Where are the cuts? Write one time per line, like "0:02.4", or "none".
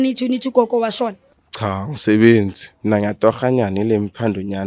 none